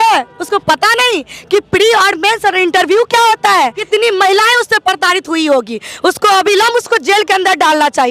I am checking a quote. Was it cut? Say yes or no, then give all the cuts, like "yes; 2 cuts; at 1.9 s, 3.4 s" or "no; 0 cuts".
yes; 1 cut; at 3.8 s